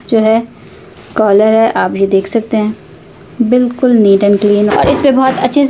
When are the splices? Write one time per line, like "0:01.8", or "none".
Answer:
0:04.7